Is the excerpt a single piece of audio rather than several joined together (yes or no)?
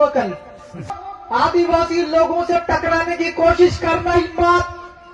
no